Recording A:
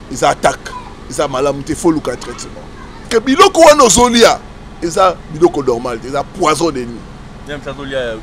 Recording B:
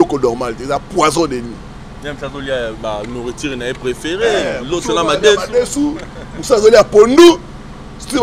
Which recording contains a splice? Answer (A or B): A